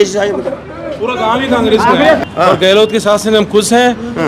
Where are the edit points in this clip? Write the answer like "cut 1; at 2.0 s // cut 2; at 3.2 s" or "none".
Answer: cut 1; at 2.2 s